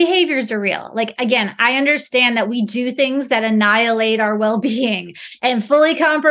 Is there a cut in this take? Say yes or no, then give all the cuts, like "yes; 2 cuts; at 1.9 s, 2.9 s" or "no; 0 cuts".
no; 0 cuts